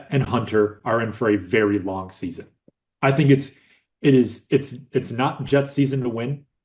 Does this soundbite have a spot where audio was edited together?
no; 0 cuts

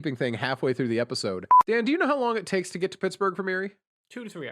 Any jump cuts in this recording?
yes; 1 cut; at 1.5 s

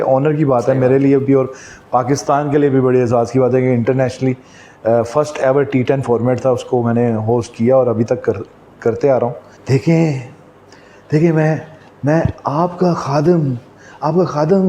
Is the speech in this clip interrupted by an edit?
yes; 1 cut; at 9.5 s

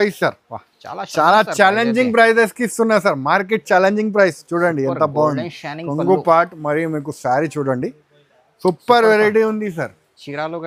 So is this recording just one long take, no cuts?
yes; 0 cuts

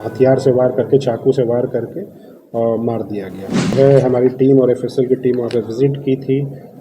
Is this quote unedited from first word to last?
no; 1 cut; at 3.7 s

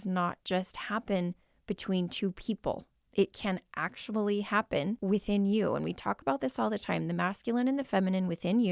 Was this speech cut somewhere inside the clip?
yes; 2 cuts; at 2.9 s, 5.0 s

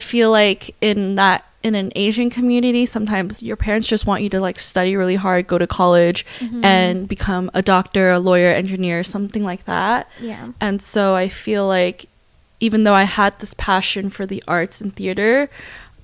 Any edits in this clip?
yes; 1 cut; at 3.4 s

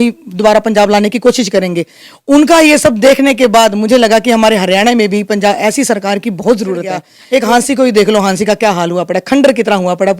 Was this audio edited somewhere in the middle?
yes; 1 cut; at 7.1 s

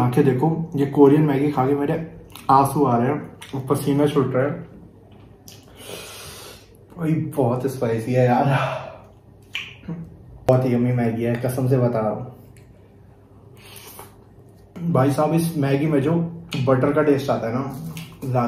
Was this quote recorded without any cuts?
no; 2 cuts; at 10.5 s, 14.8 s

